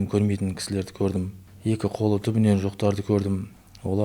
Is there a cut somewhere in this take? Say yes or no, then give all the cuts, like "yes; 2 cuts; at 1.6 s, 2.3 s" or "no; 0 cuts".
yes; 1 cut; at 1.4 s